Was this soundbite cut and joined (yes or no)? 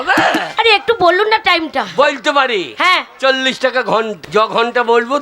yes